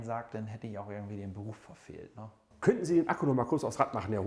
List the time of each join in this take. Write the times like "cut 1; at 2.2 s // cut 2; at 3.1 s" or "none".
cut 1; at 2.4 s